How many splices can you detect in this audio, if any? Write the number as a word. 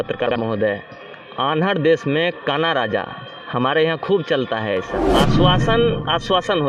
one